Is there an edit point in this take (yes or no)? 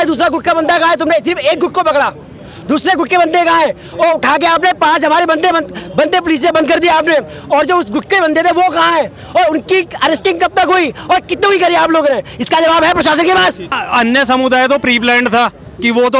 yes